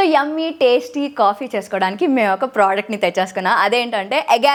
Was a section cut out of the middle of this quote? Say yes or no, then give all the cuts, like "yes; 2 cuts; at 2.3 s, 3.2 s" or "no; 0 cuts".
no; 0 cuts